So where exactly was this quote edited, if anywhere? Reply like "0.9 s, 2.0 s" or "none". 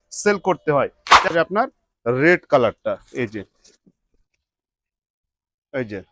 1.3 s

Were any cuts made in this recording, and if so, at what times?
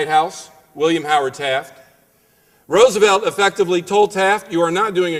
3.0 s

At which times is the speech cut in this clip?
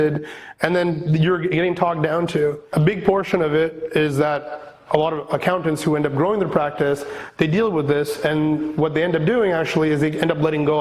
2.6 s

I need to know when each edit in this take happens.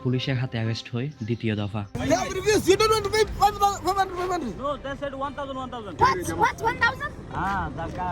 1.9 s, 6.0 s

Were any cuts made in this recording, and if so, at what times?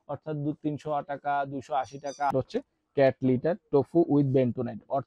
2.3 s

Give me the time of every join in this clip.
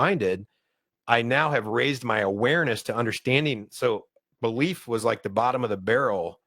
3.7 s

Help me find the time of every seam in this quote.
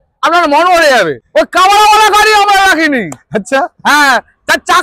1.2 s

